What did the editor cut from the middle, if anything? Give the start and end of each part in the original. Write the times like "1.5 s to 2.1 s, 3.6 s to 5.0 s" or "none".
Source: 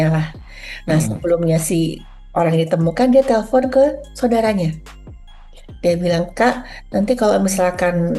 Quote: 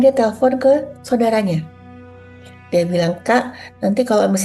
none